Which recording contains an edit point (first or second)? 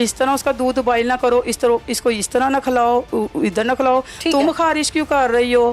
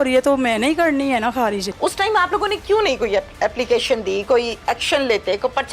second